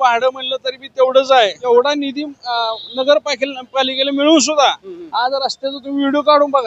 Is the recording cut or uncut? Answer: cut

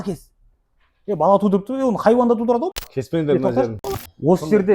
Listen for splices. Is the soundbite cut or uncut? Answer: cut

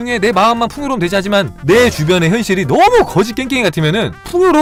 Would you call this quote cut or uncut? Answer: uncut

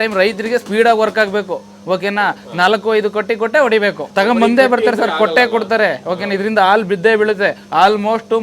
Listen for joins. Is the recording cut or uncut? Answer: uncut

